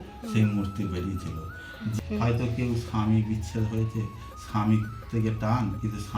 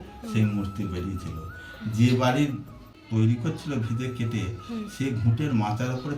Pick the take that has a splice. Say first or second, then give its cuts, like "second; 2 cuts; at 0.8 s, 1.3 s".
first; 1 cut; at 1.9 s